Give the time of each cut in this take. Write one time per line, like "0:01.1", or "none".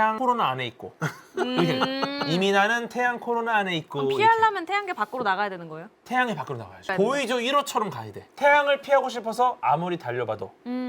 0:08.2